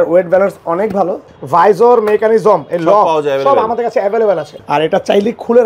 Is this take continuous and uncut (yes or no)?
no